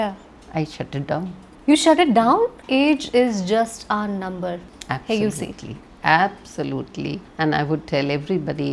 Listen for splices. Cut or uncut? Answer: cut